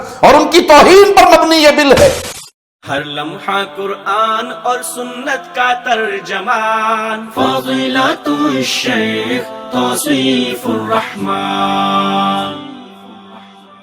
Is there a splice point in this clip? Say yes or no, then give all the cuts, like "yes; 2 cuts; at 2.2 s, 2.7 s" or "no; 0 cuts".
yes; 1 cut; at 2.3 s